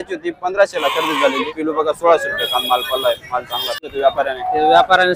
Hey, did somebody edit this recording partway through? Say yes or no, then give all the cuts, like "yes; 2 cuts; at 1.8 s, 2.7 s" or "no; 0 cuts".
yes; 2 cuts; at 1.5 s, 3.9 s